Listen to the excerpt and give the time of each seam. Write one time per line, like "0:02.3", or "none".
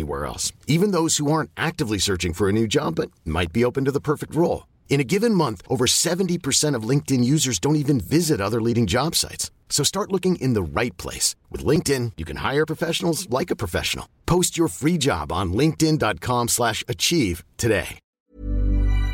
0:18.0